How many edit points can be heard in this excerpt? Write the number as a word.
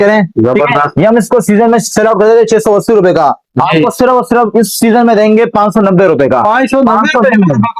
zero